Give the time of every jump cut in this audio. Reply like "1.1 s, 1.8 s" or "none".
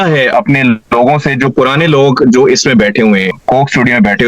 3.3 s